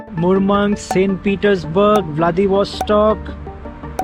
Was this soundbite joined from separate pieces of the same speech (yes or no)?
no